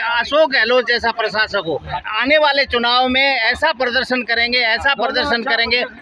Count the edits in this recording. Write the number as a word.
one